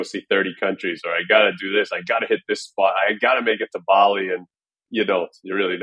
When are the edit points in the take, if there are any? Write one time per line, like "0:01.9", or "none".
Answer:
0:04.8